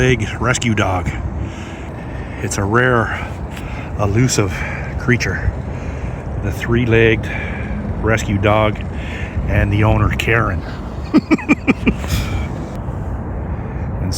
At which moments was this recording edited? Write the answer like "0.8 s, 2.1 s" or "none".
1.9 s, 12.8 s